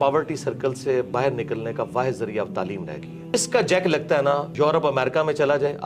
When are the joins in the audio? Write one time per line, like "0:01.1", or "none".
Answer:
0:03.3
0:04.5